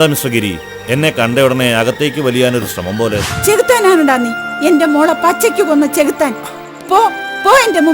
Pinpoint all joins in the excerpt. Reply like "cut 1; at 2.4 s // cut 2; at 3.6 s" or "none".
cut 1; at 3.3 s